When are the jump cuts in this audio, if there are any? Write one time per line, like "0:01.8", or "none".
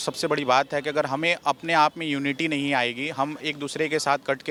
none